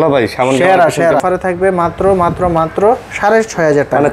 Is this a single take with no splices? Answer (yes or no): no